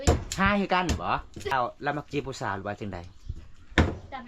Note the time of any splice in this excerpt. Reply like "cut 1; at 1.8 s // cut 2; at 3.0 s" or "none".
cut 1; at 1.5 s